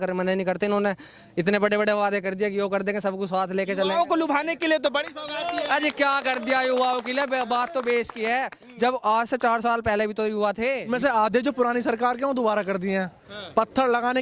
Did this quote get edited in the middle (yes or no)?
yes